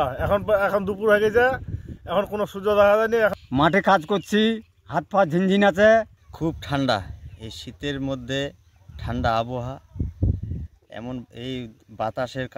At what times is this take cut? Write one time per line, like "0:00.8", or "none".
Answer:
0:03.4
0:06.2